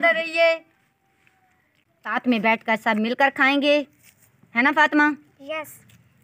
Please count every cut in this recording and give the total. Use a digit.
1